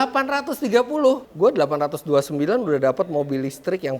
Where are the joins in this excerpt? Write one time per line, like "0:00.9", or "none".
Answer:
0:01.3